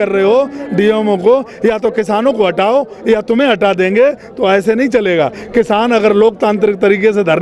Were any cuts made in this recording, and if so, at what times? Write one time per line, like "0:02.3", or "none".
none